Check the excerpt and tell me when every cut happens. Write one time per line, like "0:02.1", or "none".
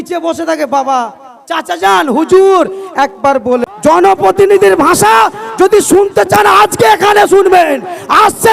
0:03.7